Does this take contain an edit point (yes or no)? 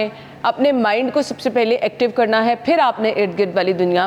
no